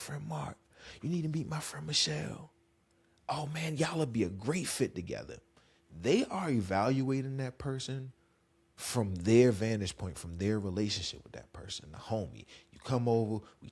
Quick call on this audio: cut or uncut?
uncut